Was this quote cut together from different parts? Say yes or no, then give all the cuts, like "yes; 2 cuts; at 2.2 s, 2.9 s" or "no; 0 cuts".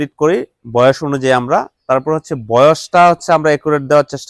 no; 0 cuts